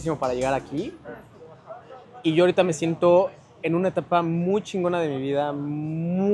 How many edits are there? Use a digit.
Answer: 0